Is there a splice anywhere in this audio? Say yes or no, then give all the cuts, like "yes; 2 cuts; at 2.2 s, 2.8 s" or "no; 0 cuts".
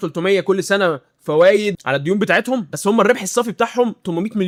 no; 0 cuts